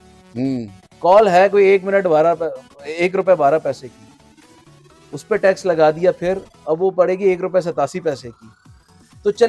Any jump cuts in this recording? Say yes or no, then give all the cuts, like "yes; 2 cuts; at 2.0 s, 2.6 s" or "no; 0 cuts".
no; 0 cuts